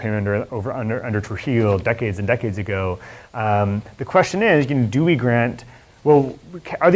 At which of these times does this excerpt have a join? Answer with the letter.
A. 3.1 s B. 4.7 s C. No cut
C